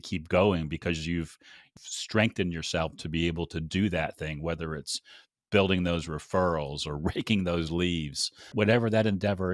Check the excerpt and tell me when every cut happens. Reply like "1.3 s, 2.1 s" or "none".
1.7 s, 8.5 s